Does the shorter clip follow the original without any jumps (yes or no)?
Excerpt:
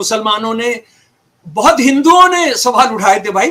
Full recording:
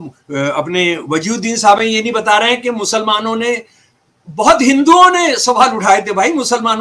yes